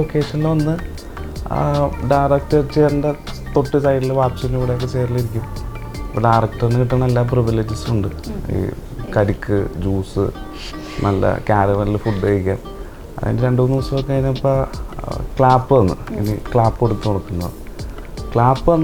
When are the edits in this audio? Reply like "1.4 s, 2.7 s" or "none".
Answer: none